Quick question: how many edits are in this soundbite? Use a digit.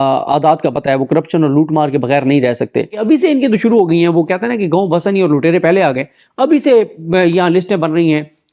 1